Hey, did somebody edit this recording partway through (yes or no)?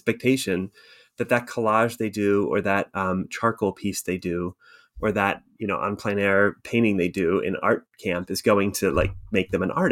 no